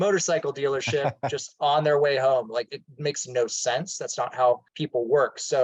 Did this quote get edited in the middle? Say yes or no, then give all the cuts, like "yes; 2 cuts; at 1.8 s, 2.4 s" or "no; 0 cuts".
yes; 1 cut; at 4.7 s